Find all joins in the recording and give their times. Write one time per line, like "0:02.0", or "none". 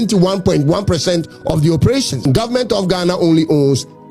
0:02.2